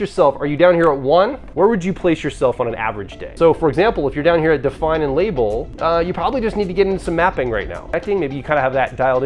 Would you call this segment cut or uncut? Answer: cut